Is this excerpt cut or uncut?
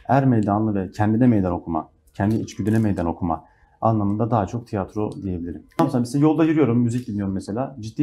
cut